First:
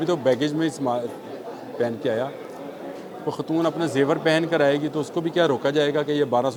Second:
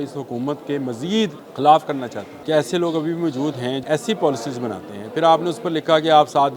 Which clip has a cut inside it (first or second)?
second